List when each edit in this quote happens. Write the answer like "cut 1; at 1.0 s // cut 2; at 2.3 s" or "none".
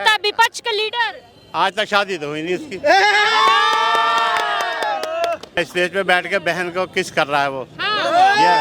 cut 1; at 5.6 s